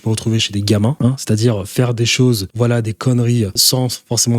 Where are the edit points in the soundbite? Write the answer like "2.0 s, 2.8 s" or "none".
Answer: 1.0 s, 2.5 s, 3.6 s